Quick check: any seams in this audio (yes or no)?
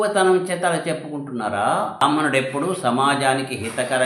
yes